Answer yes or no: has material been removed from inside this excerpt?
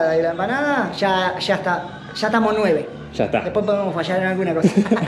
no